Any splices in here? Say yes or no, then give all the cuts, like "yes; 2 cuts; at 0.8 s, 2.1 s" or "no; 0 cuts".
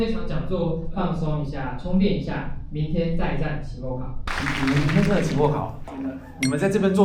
yes; 1 cut; at 4.3 s